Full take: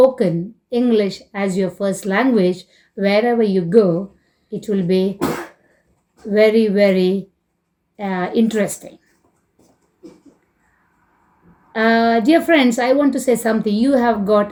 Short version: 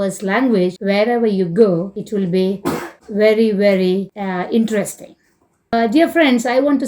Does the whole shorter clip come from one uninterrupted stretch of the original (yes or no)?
no